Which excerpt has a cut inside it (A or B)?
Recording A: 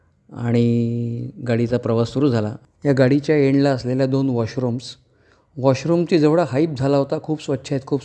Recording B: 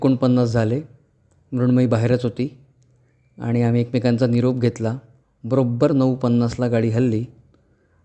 A